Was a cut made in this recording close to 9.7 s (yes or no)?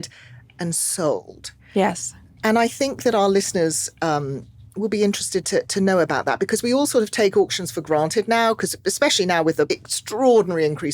yes